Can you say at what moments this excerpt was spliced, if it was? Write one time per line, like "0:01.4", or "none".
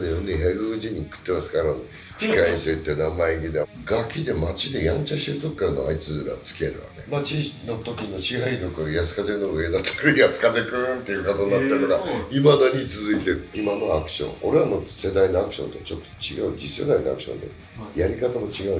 0:03.6
0:06.9
0:13.5